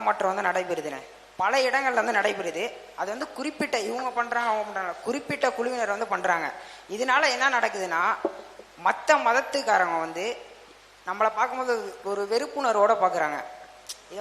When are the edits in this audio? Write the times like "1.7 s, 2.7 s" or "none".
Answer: none